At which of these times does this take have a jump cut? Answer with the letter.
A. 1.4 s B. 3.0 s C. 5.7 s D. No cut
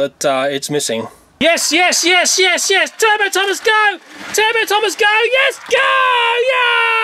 A